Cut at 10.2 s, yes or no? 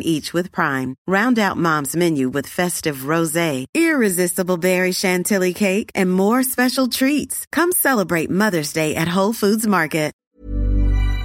yes